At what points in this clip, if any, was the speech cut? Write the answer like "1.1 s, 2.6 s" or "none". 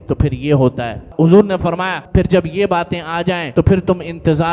1.1 s, 2.0 s, 3.4 s